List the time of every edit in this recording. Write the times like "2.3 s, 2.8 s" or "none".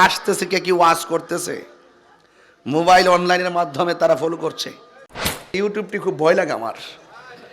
5.3 s